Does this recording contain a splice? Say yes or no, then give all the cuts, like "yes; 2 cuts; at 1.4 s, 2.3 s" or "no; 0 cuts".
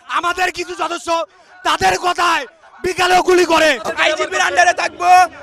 yes; 1 cut; at 3.6 s